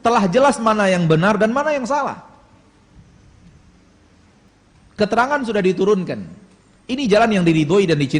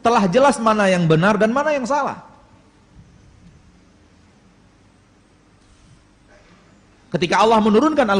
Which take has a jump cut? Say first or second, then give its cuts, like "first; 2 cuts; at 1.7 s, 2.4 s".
first; 1 cut; at 4.5 s